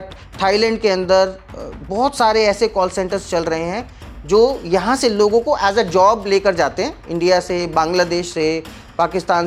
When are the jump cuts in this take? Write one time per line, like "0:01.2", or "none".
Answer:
none

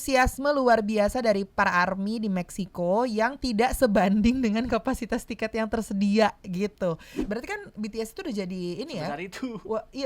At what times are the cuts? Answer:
0:07.2

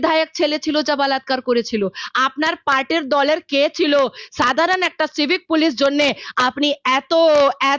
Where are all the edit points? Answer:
none

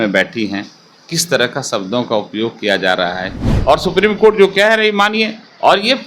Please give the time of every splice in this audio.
0:03.5

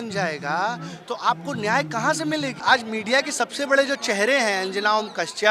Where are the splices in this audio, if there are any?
0:02.6

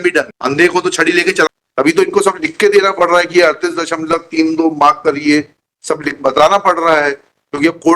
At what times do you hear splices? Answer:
0:01.6

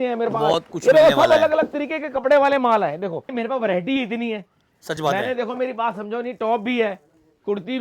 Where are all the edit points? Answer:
0:03.3

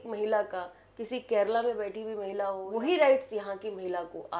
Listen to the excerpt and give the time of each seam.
0:02.6

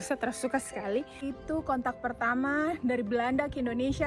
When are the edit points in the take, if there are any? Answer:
0:01.3

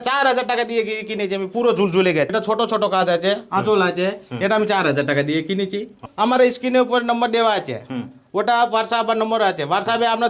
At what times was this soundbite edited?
0:02.3
0:06.1

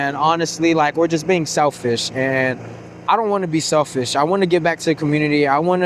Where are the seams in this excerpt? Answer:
none

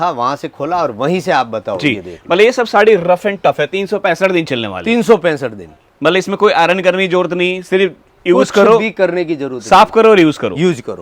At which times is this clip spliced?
none

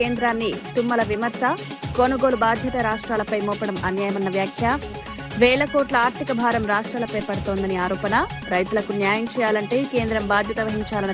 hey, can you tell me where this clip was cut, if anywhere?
none

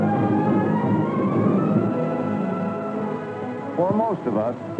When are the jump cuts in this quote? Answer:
0:01.8

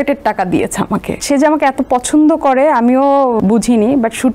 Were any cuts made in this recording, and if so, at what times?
0:01.2
0:03.4

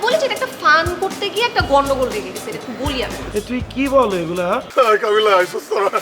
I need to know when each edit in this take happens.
0:04.7

